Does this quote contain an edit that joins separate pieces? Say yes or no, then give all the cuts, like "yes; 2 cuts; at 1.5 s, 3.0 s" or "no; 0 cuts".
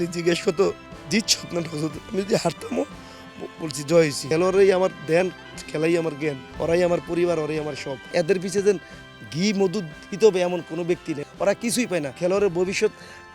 yes; 3 cuts; at 4.2 s, 8.1 s, 11.1 s